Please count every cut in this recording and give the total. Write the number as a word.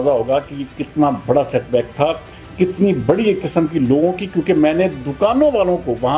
zero